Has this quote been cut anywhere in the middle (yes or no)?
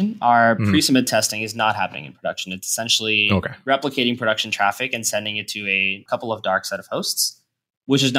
yes